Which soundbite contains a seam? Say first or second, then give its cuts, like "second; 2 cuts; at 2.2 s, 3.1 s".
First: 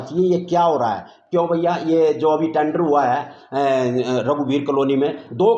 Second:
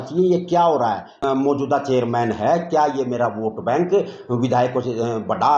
second; 1 cut; at 1.2 s